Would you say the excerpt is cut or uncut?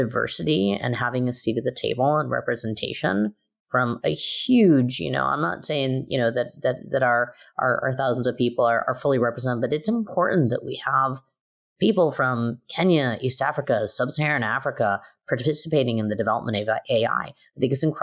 uncut